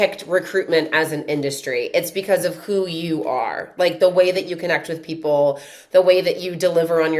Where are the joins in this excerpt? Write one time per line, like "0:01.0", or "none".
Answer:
none